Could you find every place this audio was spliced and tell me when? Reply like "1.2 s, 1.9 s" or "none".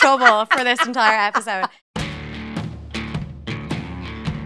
1.8 s